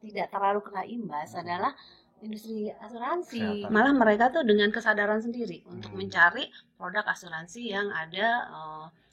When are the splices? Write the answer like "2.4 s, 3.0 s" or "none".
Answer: 3.6 s